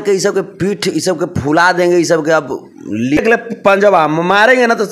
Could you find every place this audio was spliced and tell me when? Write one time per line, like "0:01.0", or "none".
0:03.2